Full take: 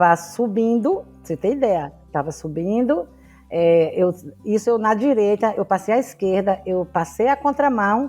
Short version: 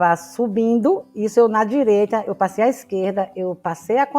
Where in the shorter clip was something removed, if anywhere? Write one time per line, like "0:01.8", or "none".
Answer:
0:01.1